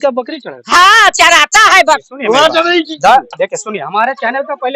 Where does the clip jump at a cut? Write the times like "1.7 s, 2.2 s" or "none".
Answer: 2.1 s